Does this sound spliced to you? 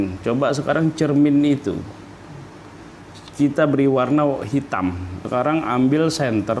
yes; 2 cuts; at 3.2 s, 5.2 s

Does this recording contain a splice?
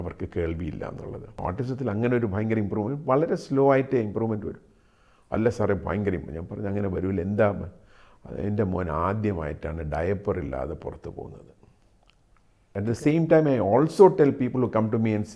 yes; 2 cuts; at 1.4 s, 12.7 s

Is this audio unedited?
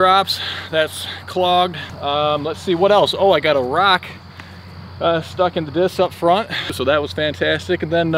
no; 2 cuts; at 1.9 s, 6.7 s

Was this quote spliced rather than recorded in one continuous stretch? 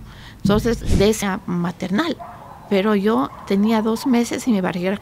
yes; 1 cut; at 1.2 s

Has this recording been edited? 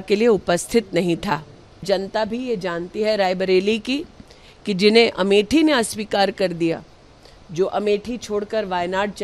yes; 1 cut; at 1.8 s

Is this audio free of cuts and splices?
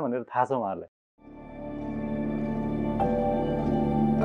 yes; 0 cuts

